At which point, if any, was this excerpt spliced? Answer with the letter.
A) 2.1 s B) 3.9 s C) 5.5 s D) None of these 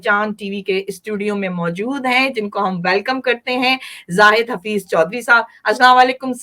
D